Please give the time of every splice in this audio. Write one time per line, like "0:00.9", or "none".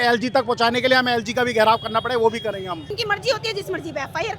0:02.9